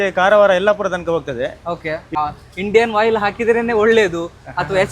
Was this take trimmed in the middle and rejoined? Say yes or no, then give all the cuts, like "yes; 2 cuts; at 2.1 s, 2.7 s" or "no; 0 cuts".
yes; 1 cut; at 2.1 s